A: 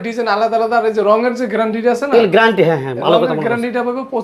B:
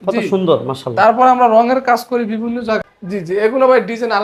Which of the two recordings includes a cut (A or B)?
B